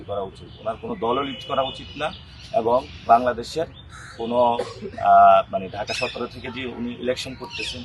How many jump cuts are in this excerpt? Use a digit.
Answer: 0